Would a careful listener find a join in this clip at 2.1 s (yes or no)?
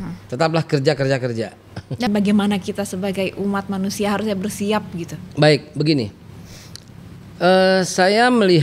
yes